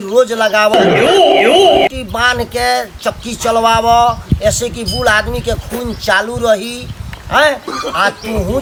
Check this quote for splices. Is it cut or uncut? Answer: uncut